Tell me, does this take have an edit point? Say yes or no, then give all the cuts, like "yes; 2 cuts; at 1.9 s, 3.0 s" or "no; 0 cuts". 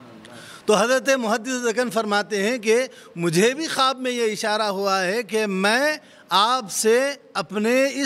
no; 0 cuts